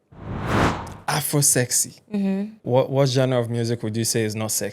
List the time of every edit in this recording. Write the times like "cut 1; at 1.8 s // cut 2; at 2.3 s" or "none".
cut 1; at 2.5 s

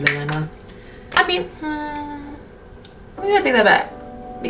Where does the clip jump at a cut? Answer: cut 1; at 1.1 s

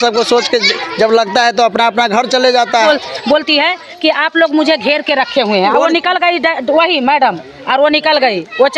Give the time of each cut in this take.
cut 1; at 2.8 s

